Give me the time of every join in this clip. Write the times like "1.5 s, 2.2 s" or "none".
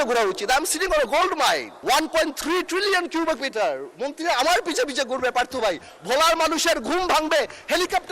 1.7 s